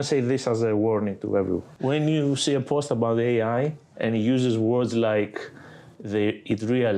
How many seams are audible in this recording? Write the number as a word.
one